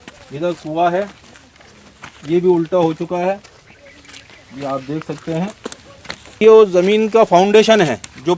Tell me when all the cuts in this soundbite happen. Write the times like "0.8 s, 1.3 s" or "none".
6.4 s